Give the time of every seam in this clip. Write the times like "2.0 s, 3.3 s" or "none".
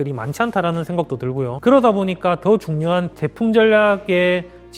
none